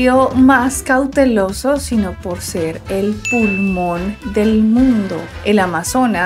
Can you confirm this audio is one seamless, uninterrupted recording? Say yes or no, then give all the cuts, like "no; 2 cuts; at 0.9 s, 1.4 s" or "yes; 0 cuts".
yes; 0 cuts